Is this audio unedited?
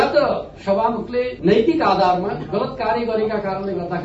yes; 0 cuts

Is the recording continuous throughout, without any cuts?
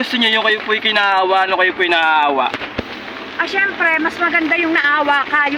yes; 0 cuts

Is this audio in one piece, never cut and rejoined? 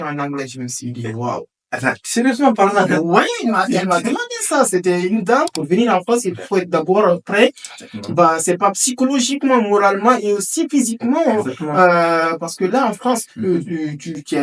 no; 1 cut; at 5.6 s

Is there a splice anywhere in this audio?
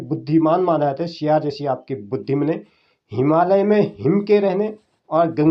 no; 0 cuts

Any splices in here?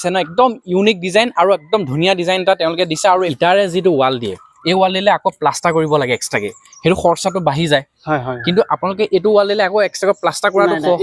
no; 0 cuts

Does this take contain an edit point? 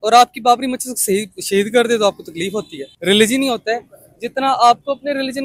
yes; 1 cut; at 2.8 s

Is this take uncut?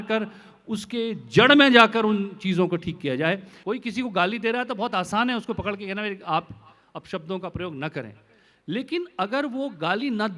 no; 1 cut; at 3.5 s

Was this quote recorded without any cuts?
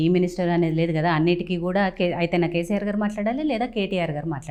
yes; 0 cuts

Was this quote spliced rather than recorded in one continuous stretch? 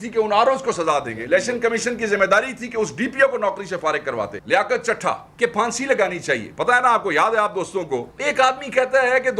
yes; 3 cuts; at 4.4 s, 5.3 s, 8.1 s

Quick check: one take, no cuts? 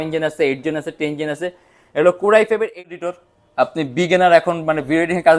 no; 1 cut; at 2.9 s

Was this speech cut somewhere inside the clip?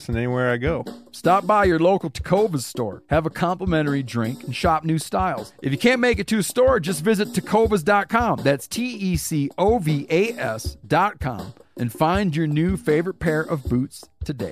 yes; 3 cuts; at 1.0 s, 3.0 s, 5.5 s

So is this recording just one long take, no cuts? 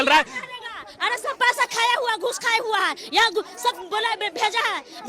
yes; 0 cuts

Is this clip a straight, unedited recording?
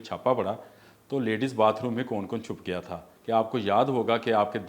no; 1 cut; at 3.1 s

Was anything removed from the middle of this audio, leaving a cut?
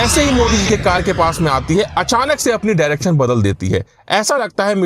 no; 0 cuts

